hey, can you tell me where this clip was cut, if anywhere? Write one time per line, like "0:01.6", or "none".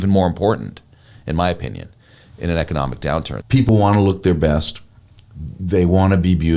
0:03.6